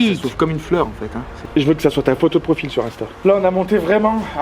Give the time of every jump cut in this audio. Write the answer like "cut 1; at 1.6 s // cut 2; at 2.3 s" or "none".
cut 1; at 1.4 s // cut 2; at 3.2 s